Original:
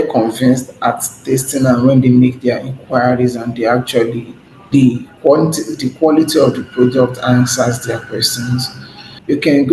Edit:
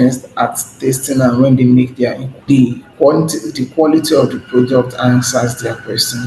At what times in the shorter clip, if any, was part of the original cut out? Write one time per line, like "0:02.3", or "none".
0:02.3